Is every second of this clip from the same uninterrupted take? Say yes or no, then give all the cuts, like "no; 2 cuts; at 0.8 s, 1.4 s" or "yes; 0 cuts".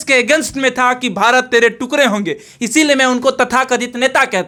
yes; 0 cuts